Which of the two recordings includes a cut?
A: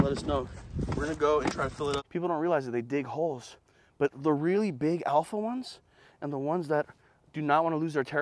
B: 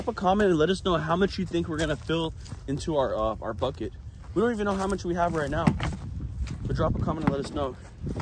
A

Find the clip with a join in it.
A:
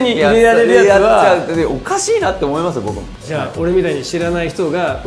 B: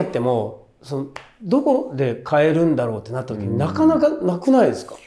A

